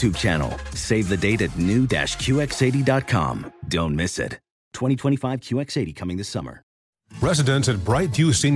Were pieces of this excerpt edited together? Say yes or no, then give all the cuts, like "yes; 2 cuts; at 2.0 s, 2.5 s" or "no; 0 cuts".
yes; 1 cut; at 6.8 s